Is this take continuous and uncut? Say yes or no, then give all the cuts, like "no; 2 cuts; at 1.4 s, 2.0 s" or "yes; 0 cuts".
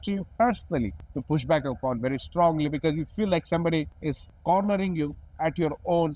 no; 2 cuts; at 1.1 s, 4.1 s